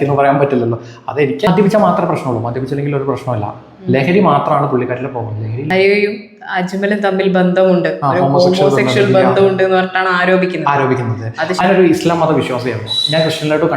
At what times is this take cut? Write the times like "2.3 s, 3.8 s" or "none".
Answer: 1.5 s, 5.7 s, 11.6 s